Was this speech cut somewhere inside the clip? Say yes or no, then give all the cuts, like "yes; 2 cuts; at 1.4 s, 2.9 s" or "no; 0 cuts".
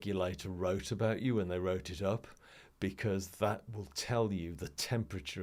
no; 0 cuts